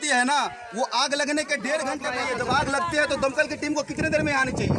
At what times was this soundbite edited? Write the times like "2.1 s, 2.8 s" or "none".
2.1 s